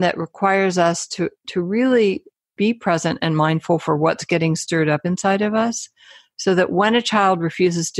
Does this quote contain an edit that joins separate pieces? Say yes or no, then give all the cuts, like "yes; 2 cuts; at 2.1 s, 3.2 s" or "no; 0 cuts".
yes; 1 cut; at 2.5 s